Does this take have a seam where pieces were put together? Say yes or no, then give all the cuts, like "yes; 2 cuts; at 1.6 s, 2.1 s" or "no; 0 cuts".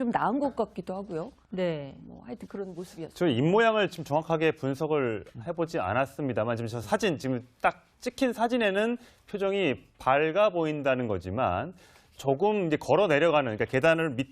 yes; 1 cut; at 7.4 s